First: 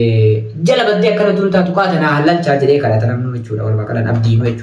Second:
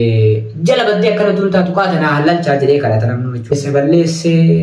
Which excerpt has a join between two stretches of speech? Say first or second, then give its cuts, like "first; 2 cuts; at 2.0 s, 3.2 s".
second; 1 cut; at 3.5 s